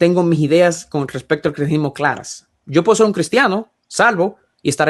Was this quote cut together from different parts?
no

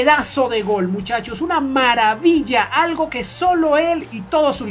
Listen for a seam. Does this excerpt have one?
no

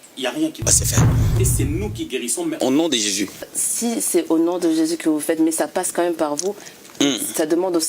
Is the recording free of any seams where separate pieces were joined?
no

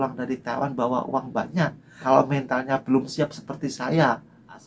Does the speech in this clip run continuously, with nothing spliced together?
no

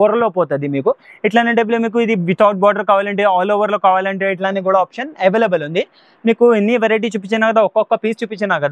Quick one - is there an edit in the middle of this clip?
no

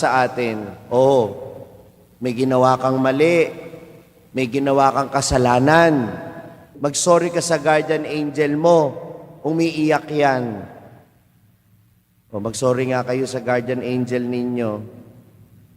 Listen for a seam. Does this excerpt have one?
yes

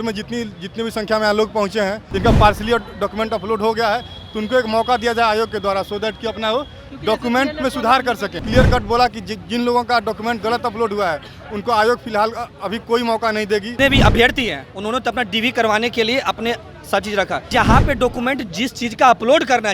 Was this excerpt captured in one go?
no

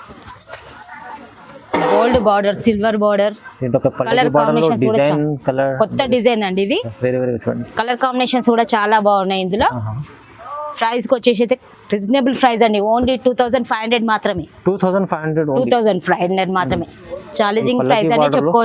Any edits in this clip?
no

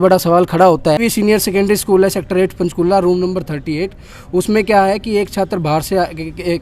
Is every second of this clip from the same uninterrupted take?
no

